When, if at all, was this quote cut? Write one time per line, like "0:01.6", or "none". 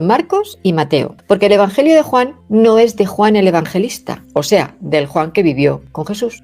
none